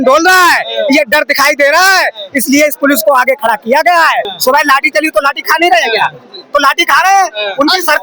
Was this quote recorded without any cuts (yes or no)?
no